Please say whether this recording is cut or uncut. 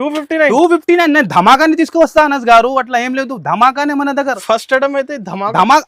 uncut